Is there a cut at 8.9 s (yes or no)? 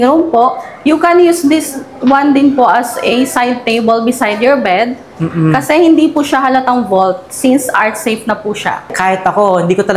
yes